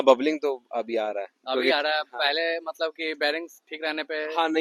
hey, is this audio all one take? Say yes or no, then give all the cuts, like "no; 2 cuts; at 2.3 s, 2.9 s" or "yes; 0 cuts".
yes; 0 cuts